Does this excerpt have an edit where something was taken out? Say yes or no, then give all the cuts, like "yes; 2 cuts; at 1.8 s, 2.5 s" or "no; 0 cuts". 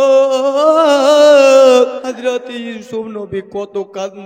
yes; 1 cut; at 2.0 s